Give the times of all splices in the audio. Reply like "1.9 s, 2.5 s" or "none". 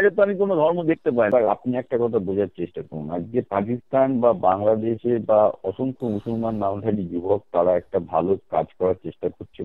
1.3 s